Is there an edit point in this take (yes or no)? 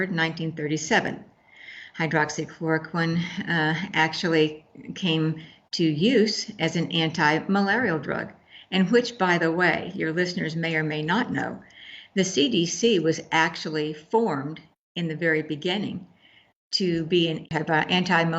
yes